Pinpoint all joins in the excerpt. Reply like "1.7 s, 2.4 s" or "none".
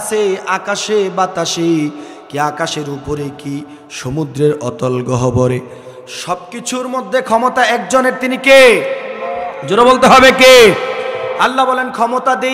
11.3 s